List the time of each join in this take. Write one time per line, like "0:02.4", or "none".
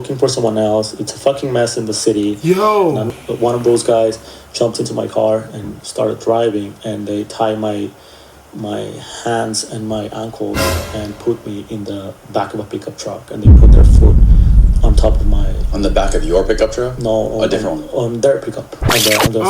0:03.1